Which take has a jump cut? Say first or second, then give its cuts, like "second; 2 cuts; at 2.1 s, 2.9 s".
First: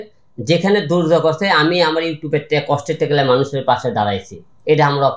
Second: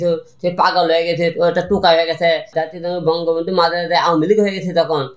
second; 1 cut; at 2.5 s